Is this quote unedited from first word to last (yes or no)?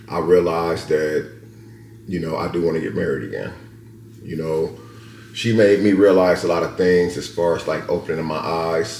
yes